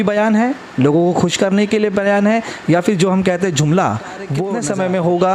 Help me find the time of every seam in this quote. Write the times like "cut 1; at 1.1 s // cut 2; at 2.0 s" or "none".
cut 1; at 4.4 s